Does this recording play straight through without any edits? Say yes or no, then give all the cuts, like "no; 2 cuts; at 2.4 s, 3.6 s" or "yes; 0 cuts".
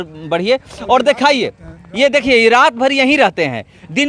yes; 0 cuts